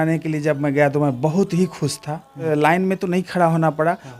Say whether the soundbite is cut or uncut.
cut